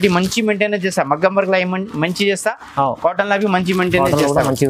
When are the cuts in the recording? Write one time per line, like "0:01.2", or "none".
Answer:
none